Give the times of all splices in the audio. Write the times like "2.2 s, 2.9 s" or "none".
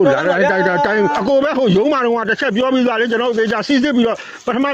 none